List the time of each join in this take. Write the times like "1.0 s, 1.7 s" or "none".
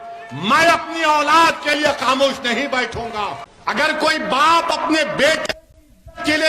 3.5 s